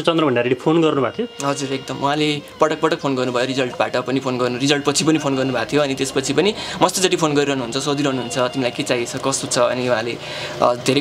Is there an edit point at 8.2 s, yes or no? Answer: no